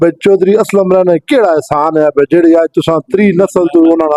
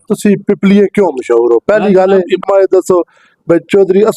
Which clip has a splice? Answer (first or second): second